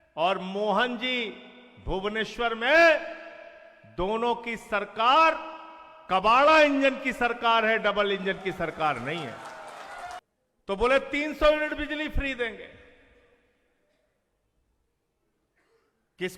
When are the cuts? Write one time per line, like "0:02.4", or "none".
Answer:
0:10.2

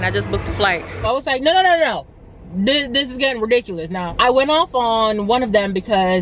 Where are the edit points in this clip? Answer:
0:01.1
0:04.0

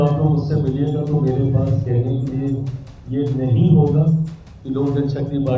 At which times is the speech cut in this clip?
none

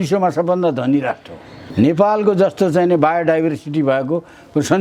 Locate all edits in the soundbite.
0:01.7

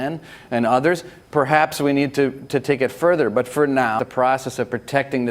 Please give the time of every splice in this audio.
0:04.0

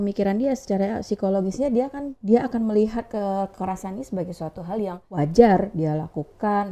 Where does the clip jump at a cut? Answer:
0:02.1
0:05.0

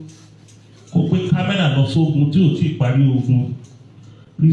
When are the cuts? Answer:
none

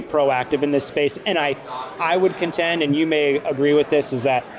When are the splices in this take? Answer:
none

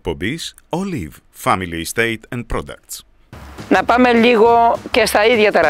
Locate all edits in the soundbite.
0:03.3

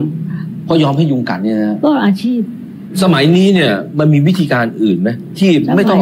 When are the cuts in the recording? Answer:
0:02.8

